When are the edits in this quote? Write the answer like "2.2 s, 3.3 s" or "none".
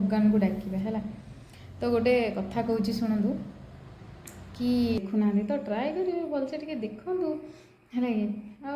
5.0 s